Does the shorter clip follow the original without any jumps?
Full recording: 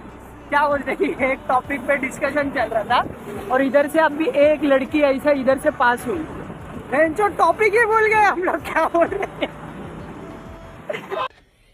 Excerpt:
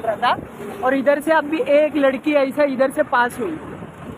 yes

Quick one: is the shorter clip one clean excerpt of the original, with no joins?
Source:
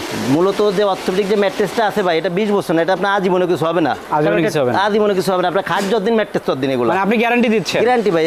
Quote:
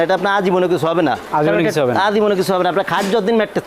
yes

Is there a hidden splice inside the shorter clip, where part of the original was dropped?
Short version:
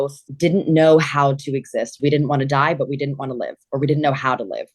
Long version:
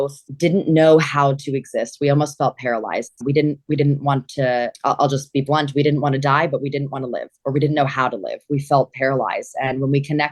yes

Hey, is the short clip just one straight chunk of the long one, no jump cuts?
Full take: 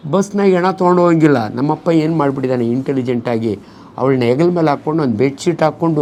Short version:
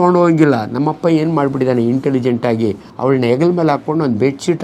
no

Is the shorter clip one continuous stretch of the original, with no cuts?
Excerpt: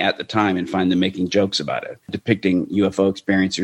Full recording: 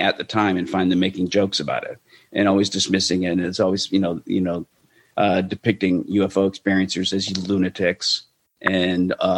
no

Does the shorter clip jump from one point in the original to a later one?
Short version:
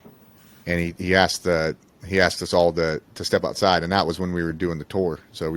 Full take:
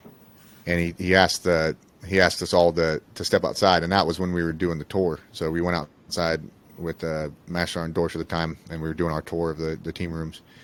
no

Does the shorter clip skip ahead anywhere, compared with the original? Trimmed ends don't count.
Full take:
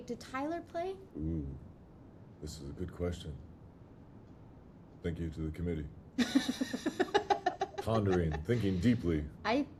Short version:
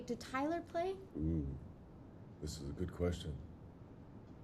no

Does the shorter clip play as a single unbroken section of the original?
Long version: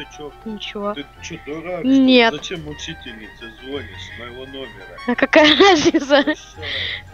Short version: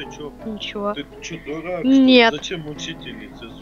yes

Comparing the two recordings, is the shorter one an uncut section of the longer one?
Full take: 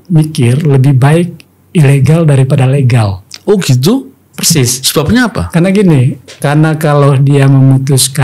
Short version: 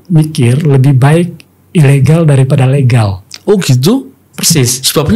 yes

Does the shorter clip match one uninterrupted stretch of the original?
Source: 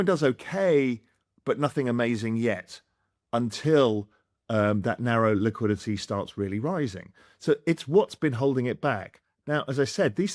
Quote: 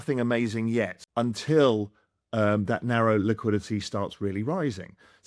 no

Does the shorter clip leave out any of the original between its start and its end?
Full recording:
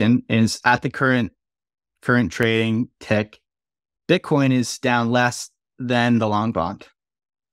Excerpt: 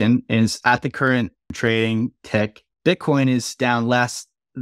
yes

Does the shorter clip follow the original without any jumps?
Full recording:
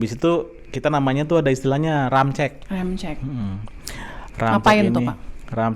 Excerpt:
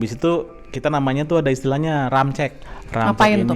no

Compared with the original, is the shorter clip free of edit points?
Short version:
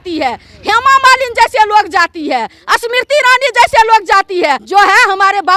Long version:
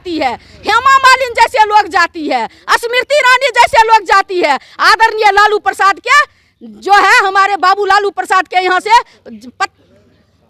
no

